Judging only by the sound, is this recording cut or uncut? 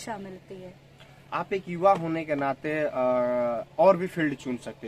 uncut